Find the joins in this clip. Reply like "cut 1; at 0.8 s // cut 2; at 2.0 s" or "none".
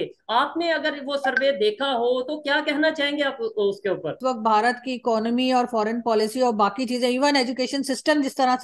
cut 1; at 4.2 s